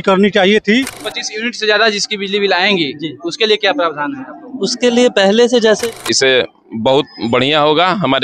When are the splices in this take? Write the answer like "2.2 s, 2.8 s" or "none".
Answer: 1.1 s, 5.8 s